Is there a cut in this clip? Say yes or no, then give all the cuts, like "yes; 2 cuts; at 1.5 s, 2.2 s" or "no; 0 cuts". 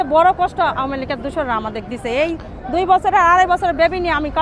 no; 0 cuts